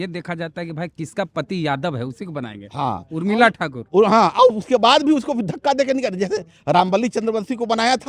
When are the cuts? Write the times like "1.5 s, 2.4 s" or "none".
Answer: none